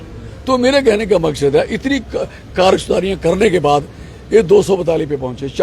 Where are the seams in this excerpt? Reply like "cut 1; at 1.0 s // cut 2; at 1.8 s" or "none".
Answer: none